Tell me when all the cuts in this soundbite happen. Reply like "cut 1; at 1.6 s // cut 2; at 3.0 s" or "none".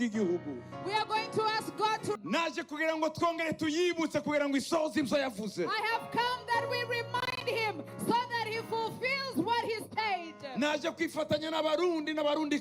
cut 1; at 2.2 s